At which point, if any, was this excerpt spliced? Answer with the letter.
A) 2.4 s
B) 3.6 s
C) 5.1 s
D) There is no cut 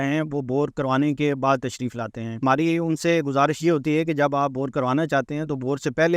A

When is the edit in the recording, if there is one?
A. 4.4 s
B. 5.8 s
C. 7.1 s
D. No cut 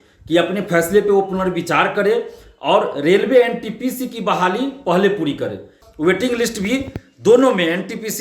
B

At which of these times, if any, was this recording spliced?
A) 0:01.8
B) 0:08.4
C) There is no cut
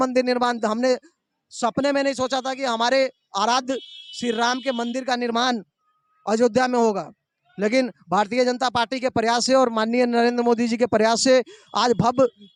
C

